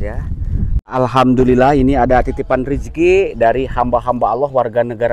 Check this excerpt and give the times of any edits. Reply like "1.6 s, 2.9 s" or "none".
0.9 s